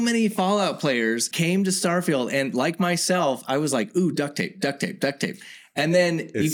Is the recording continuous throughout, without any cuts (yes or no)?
no